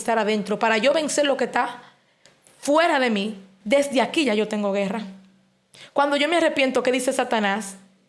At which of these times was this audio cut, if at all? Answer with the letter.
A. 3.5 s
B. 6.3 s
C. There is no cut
A